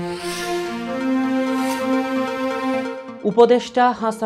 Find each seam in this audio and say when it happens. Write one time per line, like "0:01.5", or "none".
0:03.0